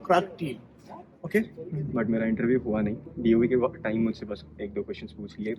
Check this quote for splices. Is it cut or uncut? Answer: cut